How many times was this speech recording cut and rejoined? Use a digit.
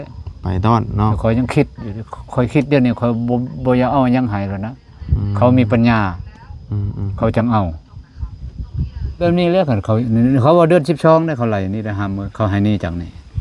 1